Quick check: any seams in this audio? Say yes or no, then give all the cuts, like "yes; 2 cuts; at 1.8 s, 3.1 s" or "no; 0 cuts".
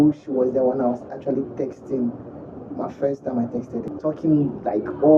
yes; 1 cut; at 3.9 s